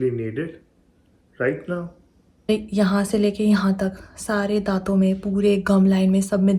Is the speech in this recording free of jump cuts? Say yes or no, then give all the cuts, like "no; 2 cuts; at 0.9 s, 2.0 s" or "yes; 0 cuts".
no; 1 cut; at 2.5 s